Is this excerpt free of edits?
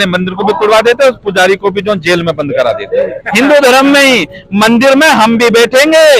no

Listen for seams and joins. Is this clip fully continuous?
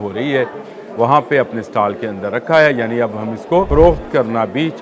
no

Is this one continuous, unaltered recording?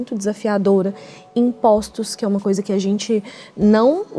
yes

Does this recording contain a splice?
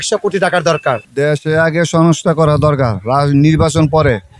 yes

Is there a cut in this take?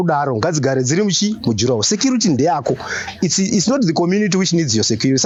no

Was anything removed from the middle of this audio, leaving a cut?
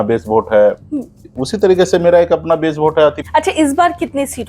yes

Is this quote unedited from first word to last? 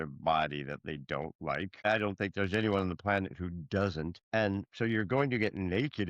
no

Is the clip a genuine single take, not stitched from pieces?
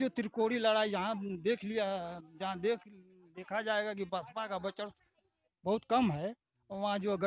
yes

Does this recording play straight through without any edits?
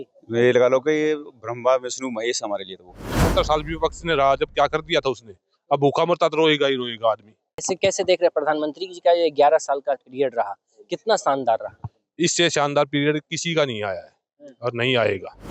no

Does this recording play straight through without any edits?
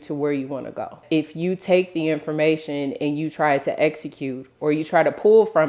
no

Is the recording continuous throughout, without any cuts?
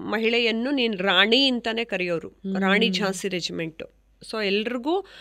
yes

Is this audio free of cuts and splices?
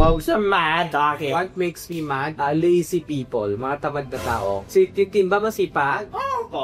yes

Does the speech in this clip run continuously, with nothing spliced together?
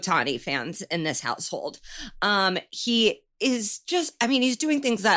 yes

